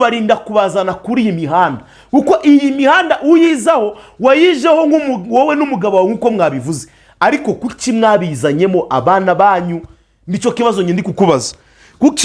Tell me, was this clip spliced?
no; 0 cuts

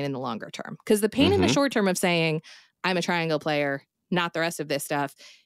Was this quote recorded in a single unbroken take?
yes; 0 cuts

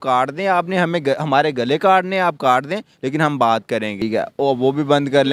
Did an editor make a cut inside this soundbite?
yes; 1 cut; at 4.0 s

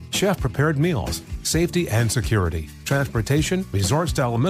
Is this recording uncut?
yes; 0 cuts

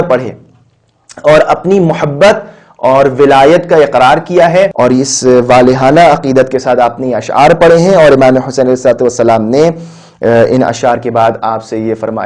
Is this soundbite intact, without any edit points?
no; 1 cut; at 4.7 s

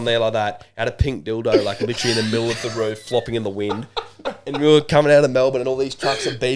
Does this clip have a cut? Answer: no; 0 cuts

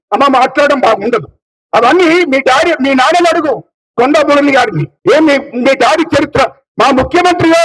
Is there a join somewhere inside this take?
no; 0 cuts

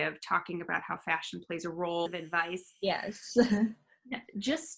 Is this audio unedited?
no; 1 cut; at 2.1 s

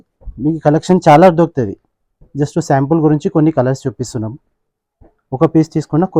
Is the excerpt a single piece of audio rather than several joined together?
yes; 0 cuts

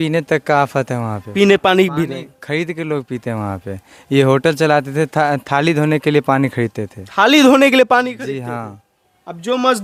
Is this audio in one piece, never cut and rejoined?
yes; 0 cuts

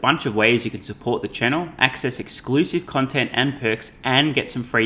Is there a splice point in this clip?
no; 0 cuts

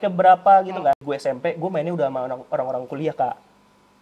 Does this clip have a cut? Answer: yes; 1 cut; at 1.1 s

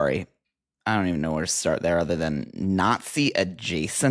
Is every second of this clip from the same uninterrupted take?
yes; 0 cuts

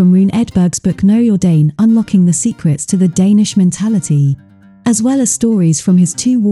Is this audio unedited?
yes; 0 cuts

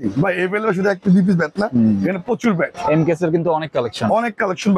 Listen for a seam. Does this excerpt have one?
no; 0 cuts

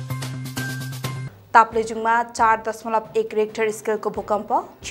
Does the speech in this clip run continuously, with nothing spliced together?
no; 1 cut; at 1.1 s

